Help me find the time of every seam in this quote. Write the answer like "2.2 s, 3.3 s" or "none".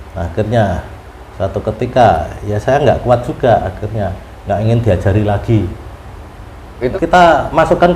6.9 s